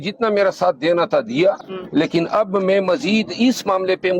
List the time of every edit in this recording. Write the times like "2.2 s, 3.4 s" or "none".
1.7 s